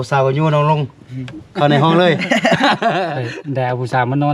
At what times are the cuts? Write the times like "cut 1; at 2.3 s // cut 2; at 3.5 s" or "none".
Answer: cut 1; at 3.2 s